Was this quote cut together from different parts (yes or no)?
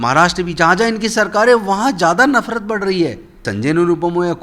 yes